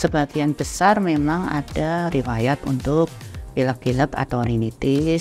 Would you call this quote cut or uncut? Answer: uncut